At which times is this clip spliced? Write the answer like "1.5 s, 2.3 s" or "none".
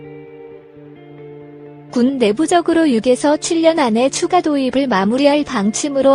1.7 s